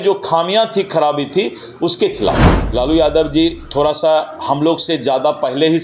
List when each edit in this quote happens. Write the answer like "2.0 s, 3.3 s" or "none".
2.5 s